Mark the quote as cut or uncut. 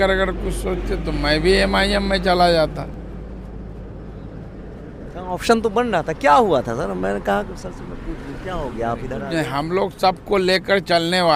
uncut